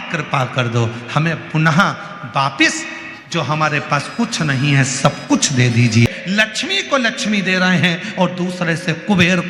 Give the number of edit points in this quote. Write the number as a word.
one